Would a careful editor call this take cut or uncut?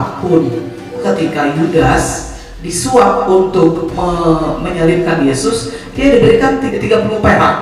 cut